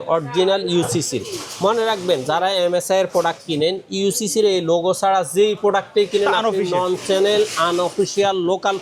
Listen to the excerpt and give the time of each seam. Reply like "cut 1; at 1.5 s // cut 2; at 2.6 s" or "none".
none